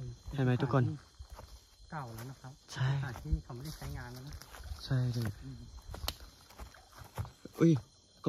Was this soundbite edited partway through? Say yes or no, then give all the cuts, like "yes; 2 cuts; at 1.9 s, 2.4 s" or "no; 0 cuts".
no; 0 cuts